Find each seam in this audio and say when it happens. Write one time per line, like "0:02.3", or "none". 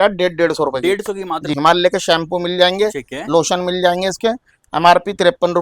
0:01.5